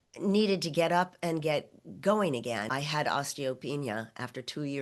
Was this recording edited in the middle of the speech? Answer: yes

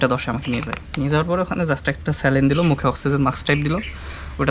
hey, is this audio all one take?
yes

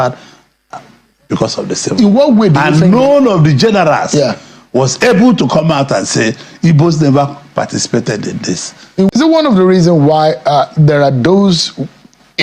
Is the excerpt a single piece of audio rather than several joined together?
no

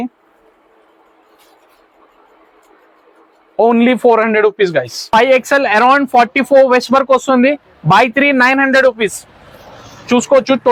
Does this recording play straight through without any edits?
no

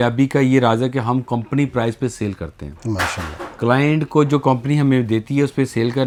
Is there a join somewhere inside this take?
no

